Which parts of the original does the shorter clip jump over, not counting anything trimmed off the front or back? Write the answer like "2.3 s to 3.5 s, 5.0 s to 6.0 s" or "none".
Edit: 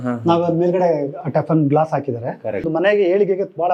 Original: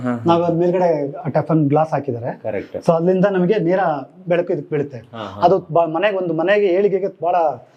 2.6 s to 6.3 s